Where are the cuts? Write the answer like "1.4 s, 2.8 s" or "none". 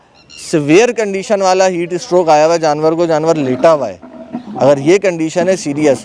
none